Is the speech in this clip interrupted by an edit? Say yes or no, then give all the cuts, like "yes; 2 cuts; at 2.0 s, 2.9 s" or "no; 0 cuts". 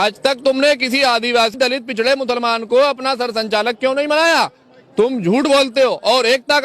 yes; 1 cut; at 1.5 s